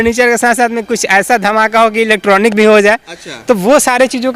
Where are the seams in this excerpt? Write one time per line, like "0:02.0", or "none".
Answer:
none